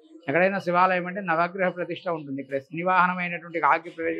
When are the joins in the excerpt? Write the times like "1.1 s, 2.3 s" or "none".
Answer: none